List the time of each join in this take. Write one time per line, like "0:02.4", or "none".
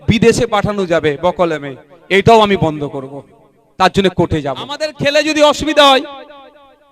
0:04.9